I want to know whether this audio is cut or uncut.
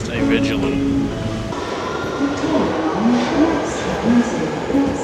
cut